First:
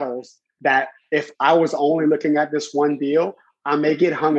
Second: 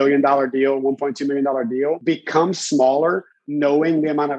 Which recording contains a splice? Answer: second; 1 cut; at 2.0 s

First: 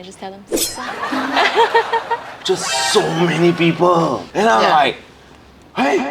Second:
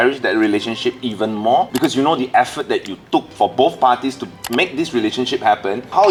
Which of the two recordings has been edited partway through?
first; 1 cut; at 2.3 s

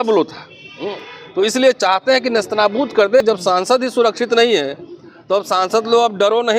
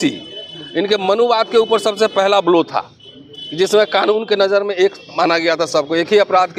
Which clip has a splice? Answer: first; 1 cut; at 3.2 s

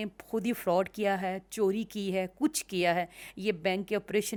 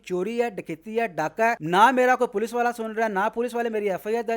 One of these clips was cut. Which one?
second; 1 cut; at 1.6 s

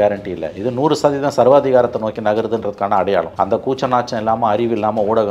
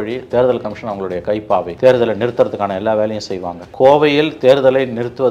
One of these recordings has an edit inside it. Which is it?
second; 2 cuts; at 1.7 s, 3.6 s

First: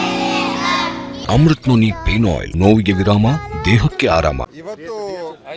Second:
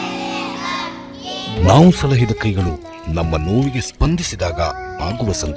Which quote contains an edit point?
first; 3 cuts; at 1.1 s, 2.5 s, 4.5 s

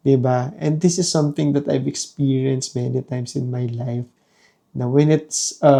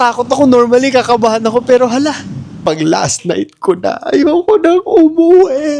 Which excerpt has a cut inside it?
second; 1 cut; at 2.5 s

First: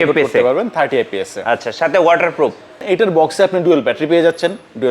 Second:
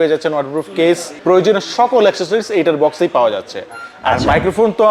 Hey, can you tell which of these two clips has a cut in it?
first; 1 cut; at 2.8 s

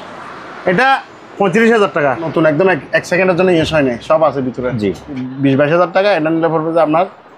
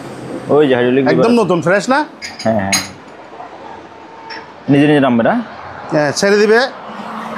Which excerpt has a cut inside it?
first; 2 cuts; at 2.3 s, 5.3 s

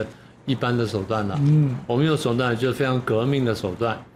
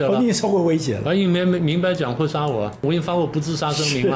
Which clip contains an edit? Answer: second; 1 cut; at 2.8 s

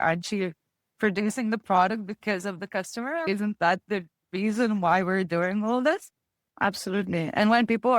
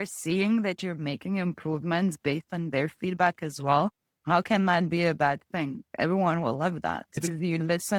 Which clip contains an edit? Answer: first; 2 cuts; at 3.2 s, 6.4 s

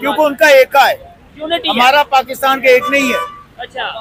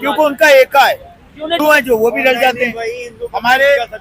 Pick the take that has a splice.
second; 1 cut; at 1.6 s

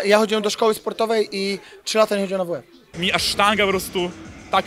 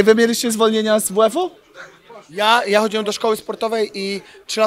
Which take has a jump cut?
first; 1 cut; at 3.0 s

